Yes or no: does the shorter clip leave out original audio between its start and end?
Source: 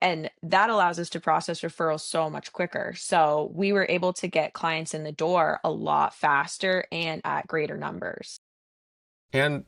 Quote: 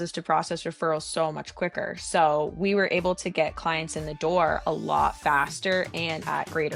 no